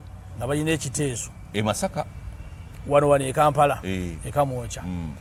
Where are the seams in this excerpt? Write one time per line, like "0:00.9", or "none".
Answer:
none

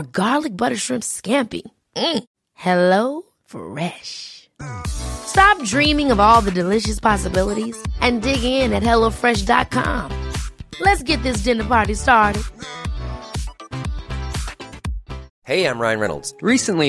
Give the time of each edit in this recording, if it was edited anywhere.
0:15.3

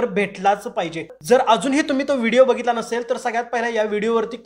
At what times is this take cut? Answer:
0:01.1

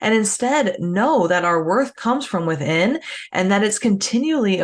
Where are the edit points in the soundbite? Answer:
none

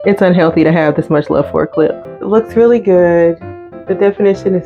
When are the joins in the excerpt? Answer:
0:02.1

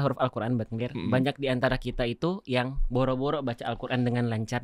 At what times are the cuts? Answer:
none

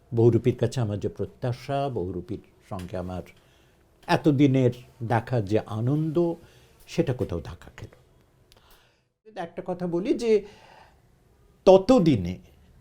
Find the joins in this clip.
0:09.2

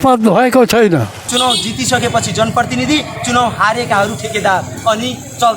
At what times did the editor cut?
0:01.2

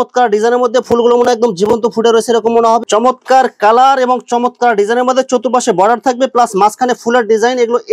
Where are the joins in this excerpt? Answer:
0:02.8

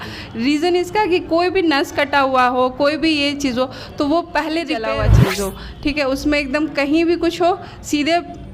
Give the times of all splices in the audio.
0:05.0

